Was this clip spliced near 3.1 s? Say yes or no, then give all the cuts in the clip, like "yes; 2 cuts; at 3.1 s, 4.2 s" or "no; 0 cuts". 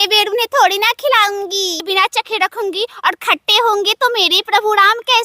no; 1 cut; at 1.8 s